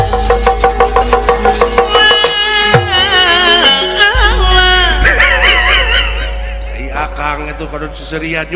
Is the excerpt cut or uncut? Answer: cut